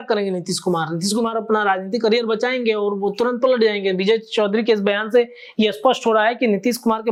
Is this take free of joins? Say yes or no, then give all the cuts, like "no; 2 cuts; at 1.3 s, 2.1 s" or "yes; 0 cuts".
yes; 0 cuts